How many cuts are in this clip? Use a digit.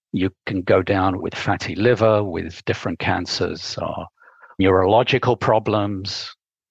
3